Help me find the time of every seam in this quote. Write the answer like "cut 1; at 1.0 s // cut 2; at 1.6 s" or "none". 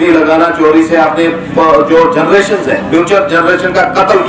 none